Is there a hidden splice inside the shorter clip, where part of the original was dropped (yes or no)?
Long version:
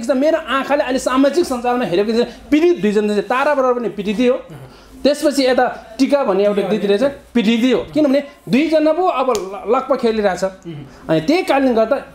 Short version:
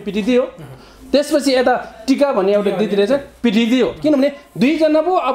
no